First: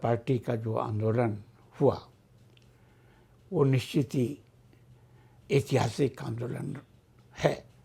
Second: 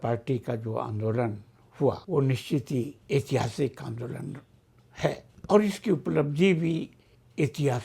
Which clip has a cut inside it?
second; 3 cuts; at 2.0 s, 3.0 s, 5.3 s

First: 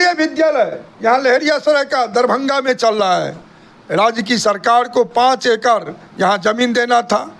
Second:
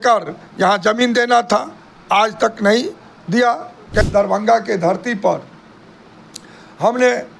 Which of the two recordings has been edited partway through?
second; 1 cut; at 4.0 s

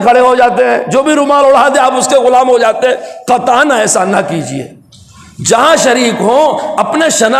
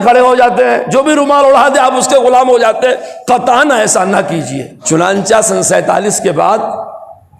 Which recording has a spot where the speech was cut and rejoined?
second; 1 cut; at 4.8 s

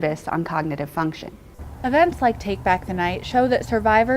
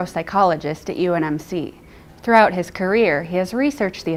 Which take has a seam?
first; 1 cut; at 1.4 s

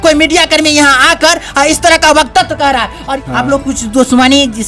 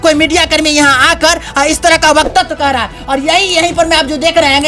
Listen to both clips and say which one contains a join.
first; 1 cut; at 3.1 s

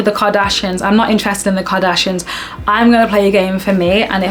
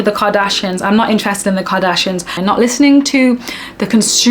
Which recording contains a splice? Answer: second; 1 cut; at 2.3 s

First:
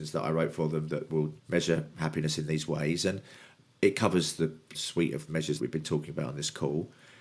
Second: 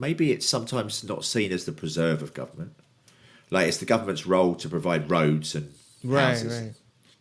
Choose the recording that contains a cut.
first; 3 cuts; at 1.4 s, 4.8 s, 5.6 s

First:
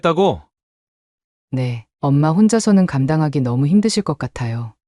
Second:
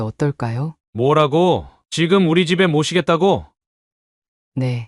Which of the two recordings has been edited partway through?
second; 1 cut; at 1.8 s

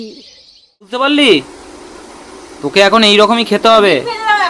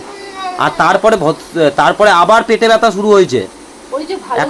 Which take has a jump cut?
first; 1 cut; at 0.9 s

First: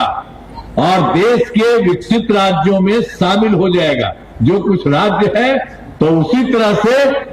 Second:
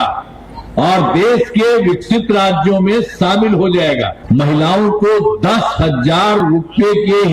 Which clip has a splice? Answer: second; 1 cut; at 4.1 s

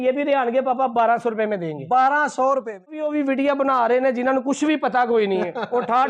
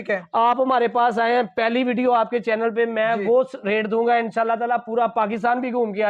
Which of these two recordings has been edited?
first; 1 cut; at 2.9 s

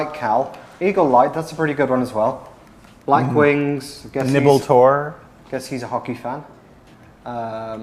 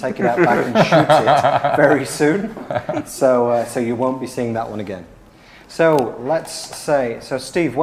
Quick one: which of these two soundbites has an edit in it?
first; 1 cut; at 2.8 s

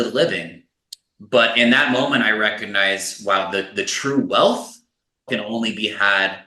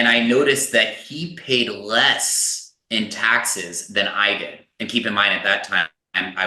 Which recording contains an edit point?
first; 1 cut; at 5.3 s

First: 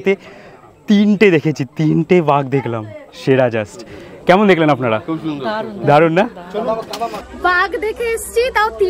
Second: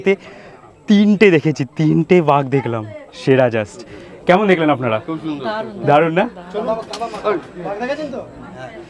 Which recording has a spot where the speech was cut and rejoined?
first; 1 cut; at 7.2 s

